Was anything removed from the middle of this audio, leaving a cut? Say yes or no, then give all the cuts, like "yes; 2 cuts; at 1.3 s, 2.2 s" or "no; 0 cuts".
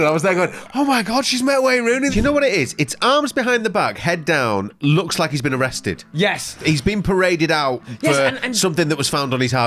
yes; 1 cut; at 2.1 s